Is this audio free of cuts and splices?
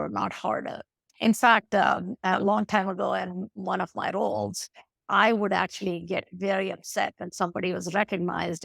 no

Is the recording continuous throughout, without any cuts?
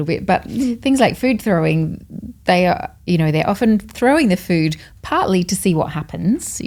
yes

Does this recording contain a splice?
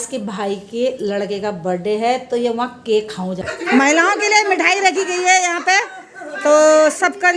yes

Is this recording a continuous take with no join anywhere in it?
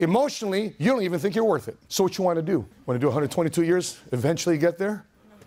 no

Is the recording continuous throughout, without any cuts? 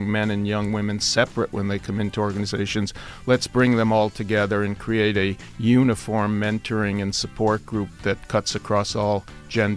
yes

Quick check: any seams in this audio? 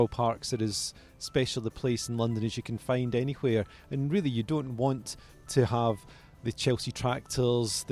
no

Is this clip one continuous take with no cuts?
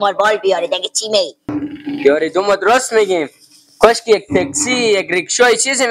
no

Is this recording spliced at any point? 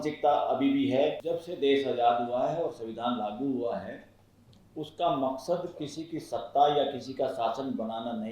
yes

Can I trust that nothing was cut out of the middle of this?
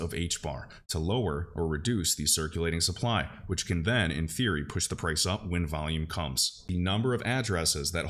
no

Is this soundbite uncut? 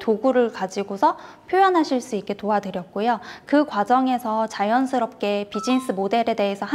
yes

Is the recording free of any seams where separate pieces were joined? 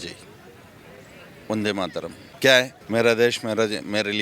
no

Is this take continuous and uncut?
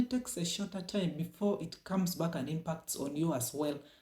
yes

